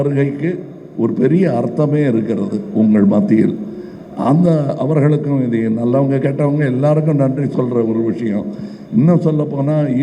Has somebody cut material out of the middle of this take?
no; 0 cuts

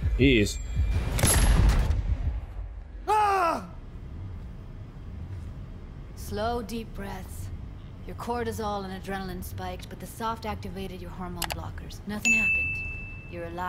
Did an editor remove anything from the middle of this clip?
no; 0 cuts

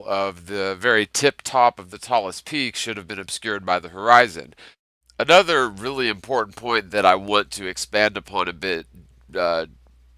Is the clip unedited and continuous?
yes; 0 cuts

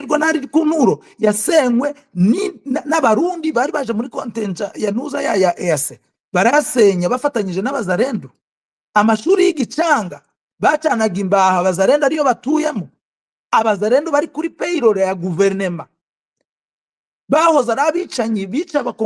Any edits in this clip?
no; 0 cuts

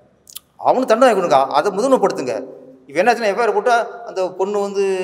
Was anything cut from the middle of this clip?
no; 0 cuts

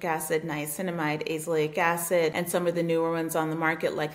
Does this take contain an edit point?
yes; 1 cut; at 2.4 s

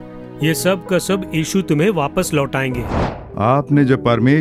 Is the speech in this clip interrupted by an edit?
yes; 1 cut; at 3.1 s

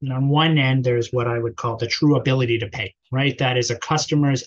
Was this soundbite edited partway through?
yes; 1 cut; at 3.0 s

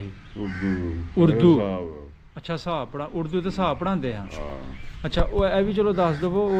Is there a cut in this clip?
no; 0 cuts

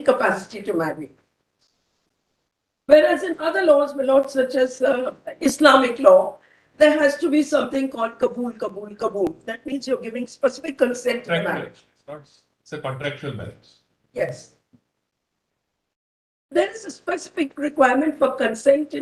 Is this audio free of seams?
yes; 0 cuts

